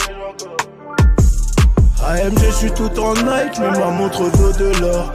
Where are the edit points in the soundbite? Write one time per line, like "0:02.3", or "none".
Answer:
0:01.9